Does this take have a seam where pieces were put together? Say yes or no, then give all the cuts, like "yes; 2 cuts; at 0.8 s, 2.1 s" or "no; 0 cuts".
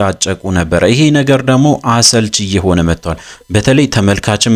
no; 0 cuts